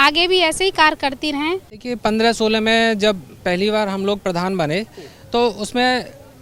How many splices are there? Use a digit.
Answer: 1